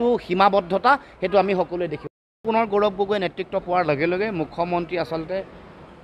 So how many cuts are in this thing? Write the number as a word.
one